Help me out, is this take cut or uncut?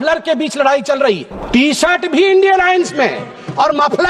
cut